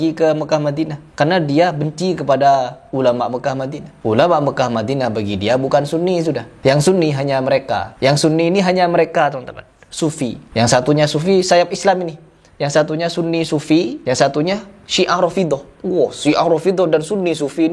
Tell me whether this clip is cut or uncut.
uncut